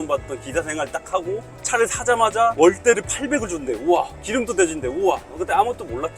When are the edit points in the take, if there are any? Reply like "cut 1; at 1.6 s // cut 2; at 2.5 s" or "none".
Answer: none